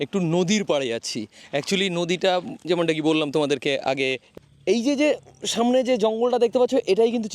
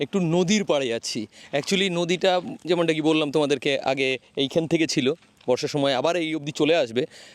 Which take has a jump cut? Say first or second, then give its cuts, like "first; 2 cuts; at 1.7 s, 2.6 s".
first; 1 cut; at 4.2 s